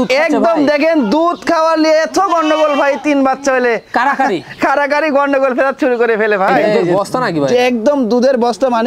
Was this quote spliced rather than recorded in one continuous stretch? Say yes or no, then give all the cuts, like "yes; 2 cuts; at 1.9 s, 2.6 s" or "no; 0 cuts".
yes; 1 cut; at 6.8 s